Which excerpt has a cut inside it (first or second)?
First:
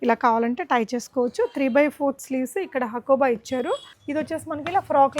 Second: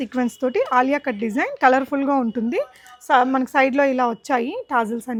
first